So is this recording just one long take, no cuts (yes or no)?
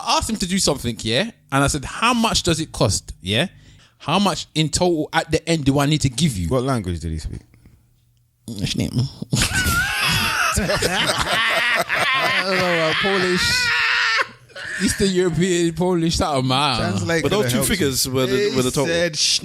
no